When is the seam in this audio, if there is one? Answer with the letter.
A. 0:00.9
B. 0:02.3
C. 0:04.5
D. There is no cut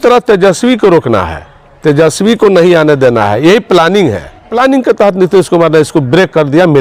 C